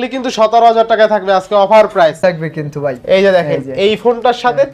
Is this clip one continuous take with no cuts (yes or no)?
no